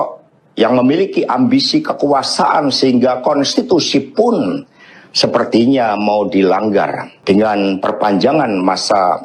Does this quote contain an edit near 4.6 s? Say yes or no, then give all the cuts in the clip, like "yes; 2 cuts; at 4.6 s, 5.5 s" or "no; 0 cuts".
no; 1 cut; at 7.1 s